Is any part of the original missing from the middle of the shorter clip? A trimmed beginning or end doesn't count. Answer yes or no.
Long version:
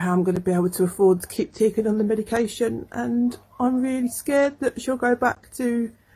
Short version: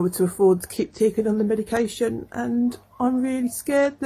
no